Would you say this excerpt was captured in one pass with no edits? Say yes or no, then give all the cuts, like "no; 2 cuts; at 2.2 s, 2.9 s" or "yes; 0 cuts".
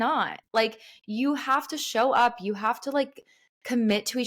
yes; 0 cuts